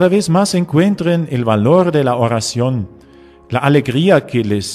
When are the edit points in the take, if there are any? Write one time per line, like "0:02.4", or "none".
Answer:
0:01.9